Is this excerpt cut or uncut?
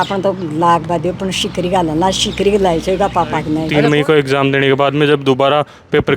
cut